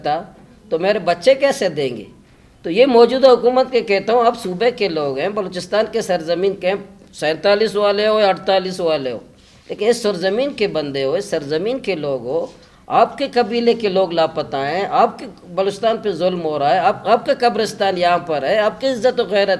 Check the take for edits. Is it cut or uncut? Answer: uncut